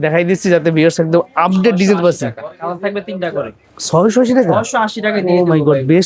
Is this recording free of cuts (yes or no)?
yes